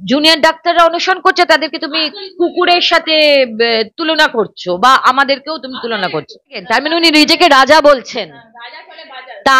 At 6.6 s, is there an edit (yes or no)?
yes